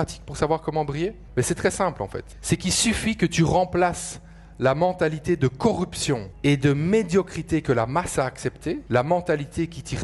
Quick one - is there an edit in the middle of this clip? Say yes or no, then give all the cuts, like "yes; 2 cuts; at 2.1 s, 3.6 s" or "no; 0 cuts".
yes; 4 cuts; at 1.2 s, 2.3 s, 6.3 s, 8.8 s